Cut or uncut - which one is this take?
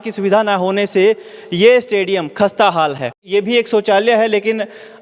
cut